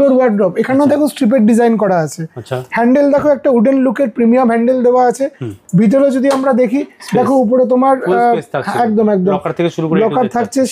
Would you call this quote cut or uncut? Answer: uncut